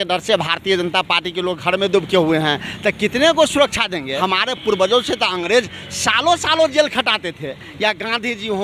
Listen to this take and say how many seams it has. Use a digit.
1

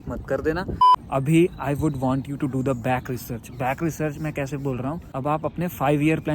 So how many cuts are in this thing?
2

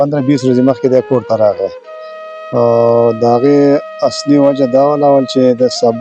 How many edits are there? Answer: 0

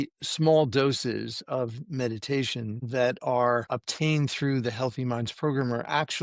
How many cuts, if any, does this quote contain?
2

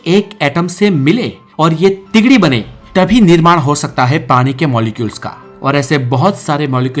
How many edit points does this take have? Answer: 0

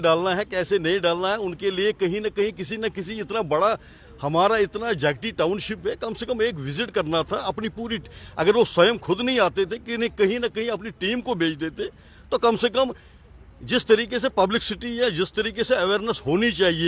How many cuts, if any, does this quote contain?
0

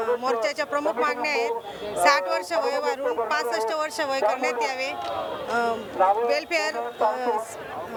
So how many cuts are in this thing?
0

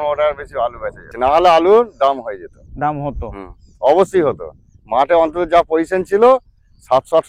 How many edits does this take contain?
1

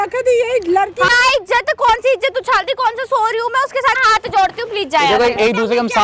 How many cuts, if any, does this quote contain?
2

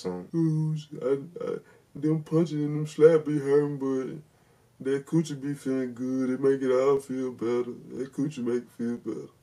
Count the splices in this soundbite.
0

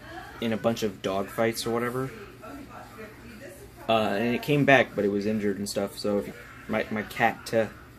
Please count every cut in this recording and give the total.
1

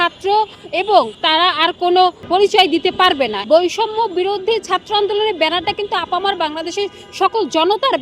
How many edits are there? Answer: 3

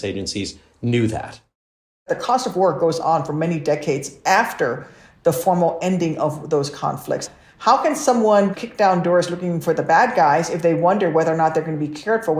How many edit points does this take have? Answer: 3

